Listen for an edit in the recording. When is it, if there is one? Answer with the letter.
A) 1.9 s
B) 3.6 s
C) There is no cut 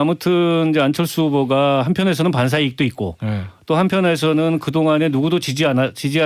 C